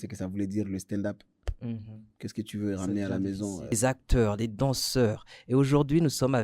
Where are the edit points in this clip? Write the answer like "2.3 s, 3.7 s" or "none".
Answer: 3.7 s